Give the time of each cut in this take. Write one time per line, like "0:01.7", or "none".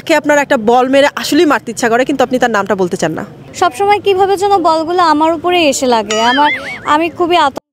0:03.4